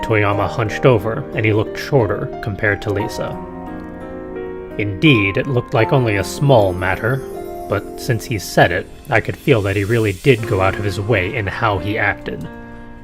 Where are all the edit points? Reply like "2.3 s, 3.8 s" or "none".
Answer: 1.1 s